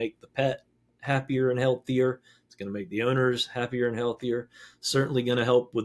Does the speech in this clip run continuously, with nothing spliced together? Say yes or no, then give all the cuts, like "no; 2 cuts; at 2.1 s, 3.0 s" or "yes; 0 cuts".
yes; 0 cuts